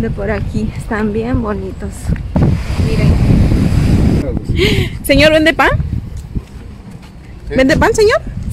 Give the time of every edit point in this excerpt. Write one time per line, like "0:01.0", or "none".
0:04.2